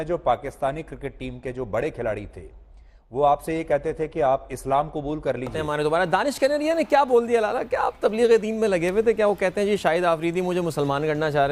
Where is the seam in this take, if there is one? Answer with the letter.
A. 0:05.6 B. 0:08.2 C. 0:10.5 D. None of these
A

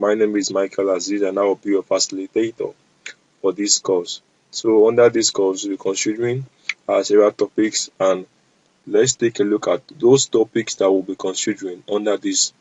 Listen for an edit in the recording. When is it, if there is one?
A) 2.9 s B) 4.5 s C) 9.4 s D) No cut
D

